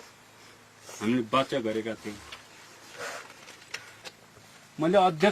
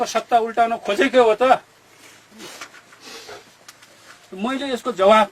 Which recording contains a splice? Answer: first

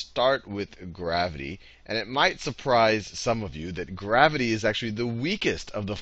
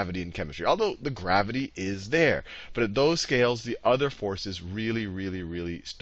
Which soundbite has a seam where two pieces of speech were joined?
second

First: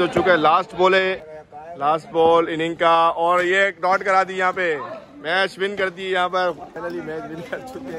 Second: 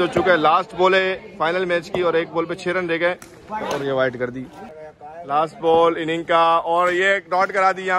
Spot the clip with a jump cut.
first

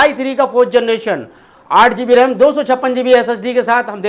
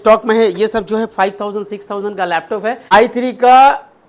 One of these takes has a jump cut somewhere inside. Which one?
second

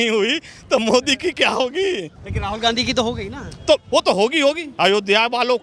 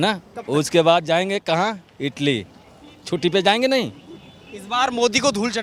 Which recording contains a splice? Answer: first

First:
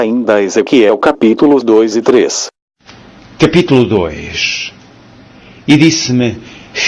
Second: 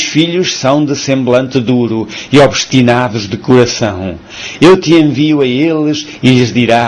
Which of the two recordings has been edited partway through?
second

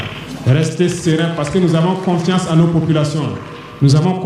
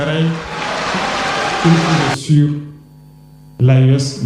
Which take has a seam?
second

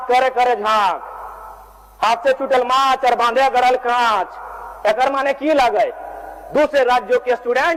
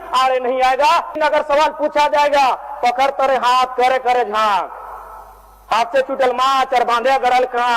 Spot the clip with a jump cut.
second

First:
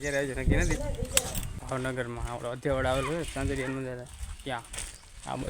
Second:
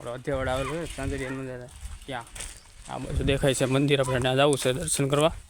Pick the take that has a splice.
first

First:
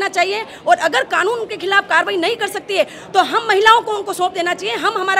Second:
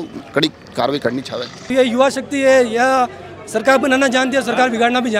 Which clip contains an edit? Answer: second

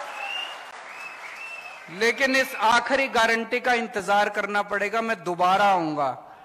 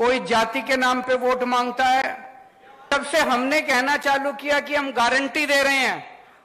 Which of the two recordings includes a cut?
second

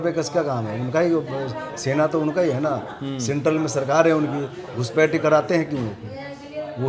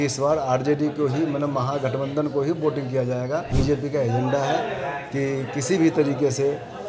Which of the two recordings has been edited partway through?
second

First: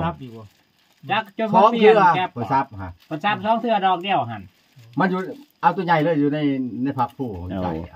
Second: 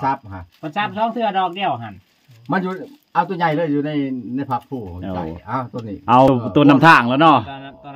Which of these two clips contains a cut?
second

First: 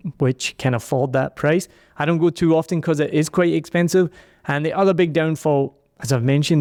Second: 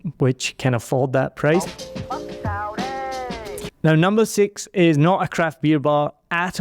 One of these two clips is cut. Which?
second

